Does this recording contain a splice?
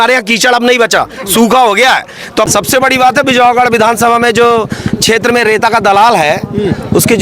yes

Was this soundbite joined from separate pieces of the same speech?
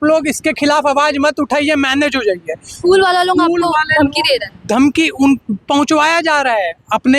no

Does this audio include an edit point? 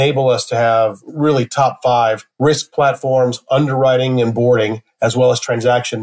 yes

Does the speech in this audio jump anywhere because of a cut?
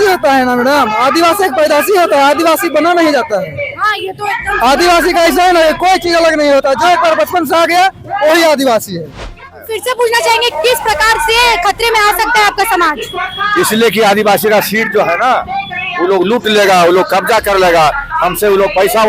yes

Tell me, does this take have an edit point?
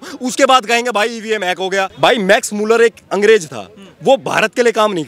yes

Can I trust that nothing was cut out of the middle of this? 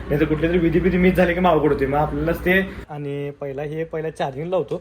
no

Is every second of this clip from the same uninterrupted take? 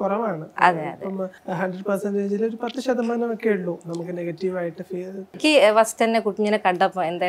no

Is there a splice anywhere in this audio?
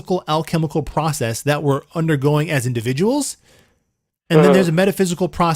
no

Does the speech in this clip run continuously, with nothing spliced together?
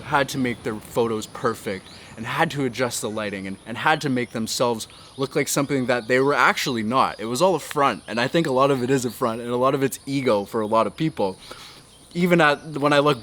yes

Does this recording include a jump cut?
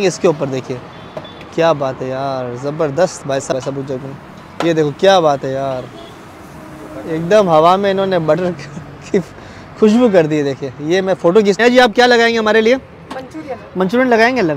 yes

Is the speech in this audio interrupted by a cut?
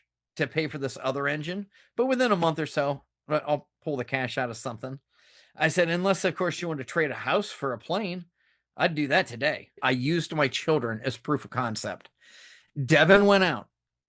yes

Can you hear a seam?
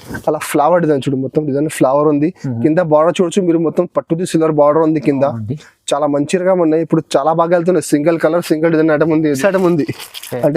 yes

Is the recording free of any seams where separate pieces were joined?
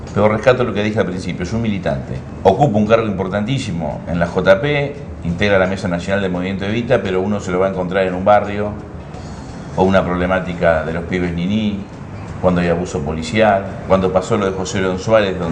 no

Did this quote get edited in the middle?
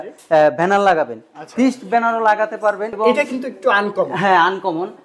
yes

